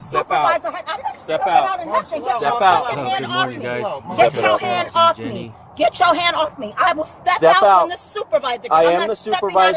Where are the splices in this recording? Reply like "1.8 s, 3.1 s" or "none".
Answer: 7.1 s